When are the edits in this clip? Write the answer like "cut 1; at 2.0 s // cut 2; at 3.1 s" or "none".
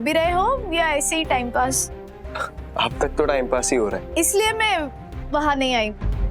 cut 1; at 4.0 s